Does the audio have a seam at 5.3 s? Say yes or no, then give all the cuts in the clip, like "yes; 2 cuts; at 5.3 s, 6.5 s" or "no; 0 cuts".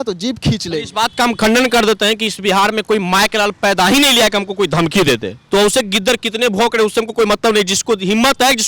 yes; 1 cut; at 5.3 s